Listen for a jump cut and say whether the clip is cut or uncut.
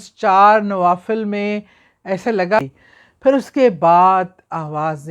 cut